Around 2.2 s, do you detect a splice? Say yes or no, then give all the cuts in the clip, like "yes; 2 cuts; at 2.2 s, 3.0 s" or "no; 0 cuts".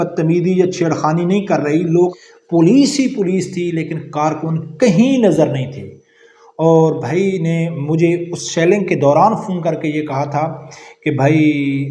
yes; 1 cut; at 2.2 s